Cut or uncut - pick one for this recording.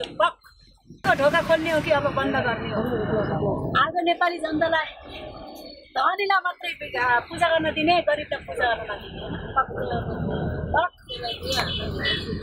cut